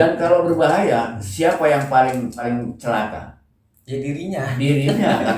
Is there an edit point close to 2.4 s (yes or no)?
yes